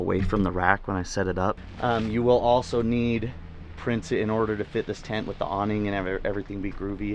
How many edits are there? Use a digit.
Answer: 1